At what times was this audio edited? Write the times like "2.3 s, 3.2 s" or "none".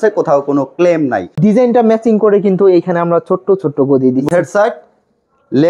1.3 s, 4.3 s